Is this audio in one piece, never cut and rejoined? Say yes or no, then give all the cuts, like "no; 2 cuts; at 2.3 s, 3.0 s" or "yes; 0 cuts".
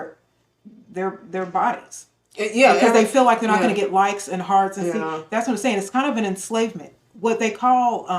yes; 0 cuts